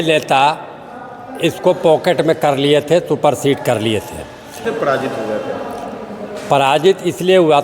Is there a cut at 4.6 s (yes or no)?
yes